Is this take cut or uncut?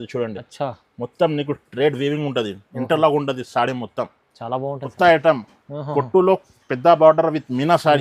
cut